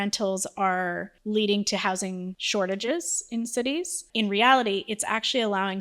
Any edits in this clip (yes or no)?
yes